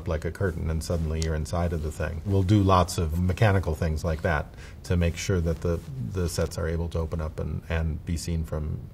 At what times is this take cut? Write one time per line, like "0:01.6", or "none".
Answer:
0:03.1